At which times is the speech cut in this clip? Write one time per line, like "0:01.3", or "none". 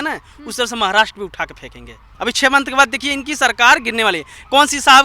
0:02.1

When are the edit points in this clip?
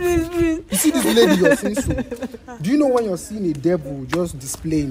none

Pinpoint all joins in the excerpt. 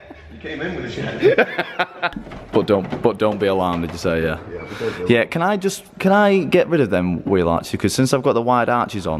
none

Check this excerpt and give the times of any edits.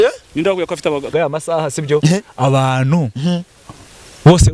0:01.1

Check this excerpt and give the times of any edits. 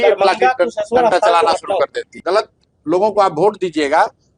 0:02.2

